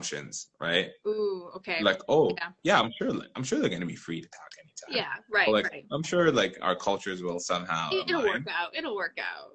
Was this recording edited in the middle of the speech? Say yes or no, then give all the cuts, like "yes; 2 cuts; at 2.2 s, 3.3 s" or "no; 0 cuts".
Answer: no; 0 cuts